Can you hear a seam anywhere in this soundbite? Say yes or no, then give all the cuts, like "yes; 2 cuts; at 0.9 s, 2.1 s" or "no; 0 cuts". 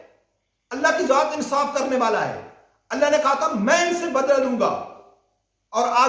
no; 0 cuts